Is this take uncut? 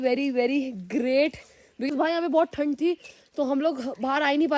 no; 1 cut; at 1.9 s

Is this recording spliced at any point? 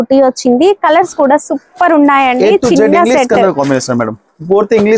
no; 0 cuts

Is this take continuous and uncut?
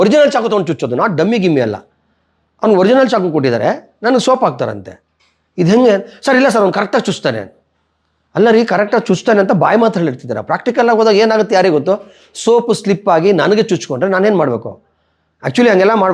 yes; 0 cuts

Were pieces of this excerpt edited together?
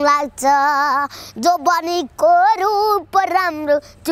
no; 0 cuts

